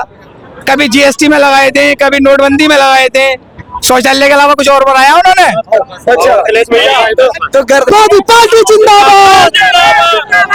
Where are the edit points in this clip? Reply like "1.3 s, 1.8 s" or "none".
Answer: none